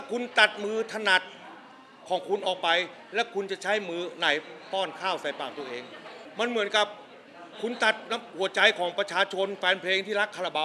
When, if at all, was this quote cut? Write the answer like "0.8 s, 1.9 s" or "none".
6.1 s